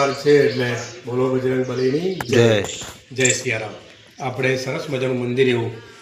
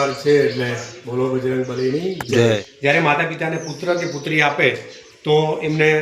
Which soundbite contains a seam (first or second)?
second